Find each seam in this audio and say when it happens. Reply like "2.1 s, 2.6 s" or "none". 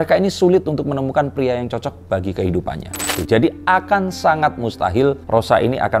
3.1 s